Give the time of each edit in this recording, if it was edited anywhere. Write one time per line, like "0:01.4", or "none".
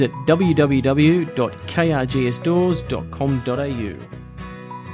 0:04.0